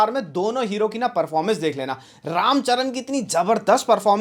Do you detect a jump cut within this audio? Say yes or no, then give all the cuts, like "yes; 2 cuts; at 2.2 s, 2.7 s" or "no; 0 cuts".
no; 0 cuts